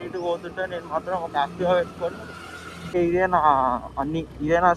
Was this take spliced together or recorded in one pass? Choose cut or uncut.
cut